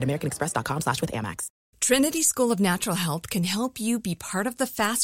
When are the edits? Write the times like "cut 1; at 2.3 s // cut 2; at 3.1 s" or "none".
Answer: cut 1; at 1.5 s